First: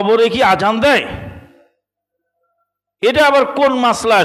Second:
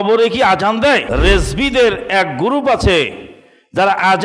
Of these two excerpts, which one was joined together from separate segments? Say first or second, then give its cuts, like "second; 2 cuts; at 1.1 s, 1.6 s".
second; 1 cut; at 1.1 s